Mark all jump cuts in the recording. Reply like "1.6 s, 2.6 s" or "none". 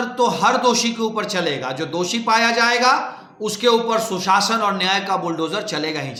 none